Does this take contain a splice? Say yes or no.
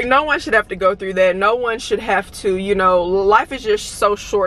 no